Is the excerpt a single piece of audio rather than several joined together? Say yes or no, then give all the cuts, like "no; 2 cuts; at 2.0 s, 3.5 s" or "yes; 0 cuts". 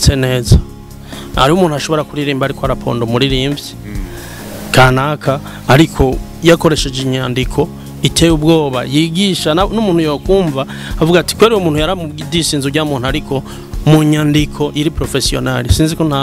yes; 0 cuts